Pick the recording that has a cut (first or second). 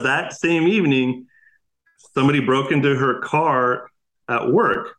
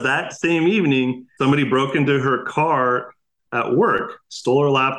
second